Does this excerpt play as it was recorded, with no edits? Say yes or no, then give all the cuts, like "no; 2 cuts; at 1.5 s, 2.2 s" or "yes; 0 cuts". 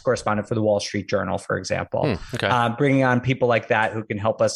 yes; 0 cuts